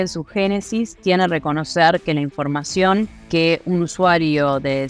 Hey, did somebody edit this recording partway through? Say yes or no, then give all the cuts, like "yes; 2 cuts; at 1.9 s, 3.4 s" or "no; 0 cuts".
yes; 1 cut; at 3.2 s